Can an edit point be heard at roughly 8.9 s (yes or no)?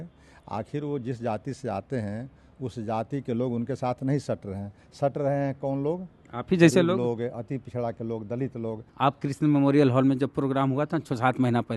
yes